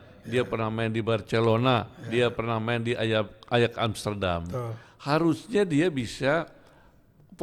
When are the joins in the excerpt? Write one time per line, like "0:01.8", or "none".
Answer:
none